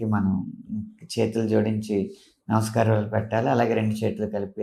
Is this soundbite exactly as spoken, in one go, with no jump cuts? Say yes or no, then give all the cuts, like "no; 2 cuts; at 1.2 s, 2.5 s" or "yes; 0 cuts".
yes; 0 cuts